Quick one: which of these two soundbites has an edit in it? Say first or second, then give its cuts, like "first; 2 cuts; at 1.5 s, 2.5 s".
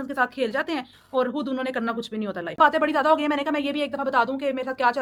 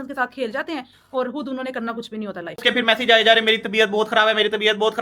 second; 1 cut; at 2.5 s